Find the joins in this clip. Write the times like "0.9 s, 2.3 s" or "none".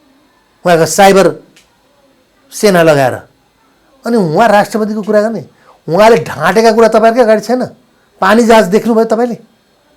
none